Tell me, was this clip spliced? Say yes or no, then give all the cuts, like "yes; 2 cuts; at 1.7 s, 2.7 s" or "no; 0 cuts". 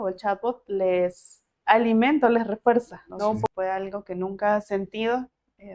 yes; 1 cut; at 3.5 s